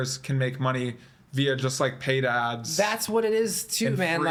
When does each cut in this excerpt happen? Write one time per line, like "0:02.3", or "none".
none